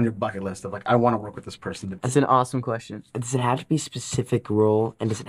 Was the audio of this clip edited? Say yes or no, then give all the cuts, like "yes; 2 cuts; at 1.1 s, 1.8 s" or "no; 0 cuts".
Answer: yes; 1 cut; at 1.9 s